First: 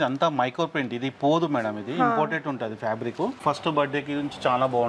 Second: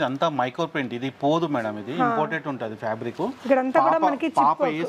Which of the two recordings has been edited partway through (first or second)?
first